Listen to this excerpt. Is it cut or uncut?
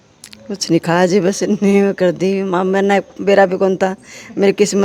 uncut